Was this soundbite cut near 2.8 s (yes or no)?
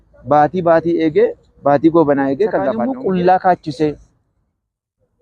yes